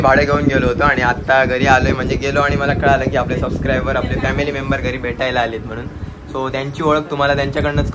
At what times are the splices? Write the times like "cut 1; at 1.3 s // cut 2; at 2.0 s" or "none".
none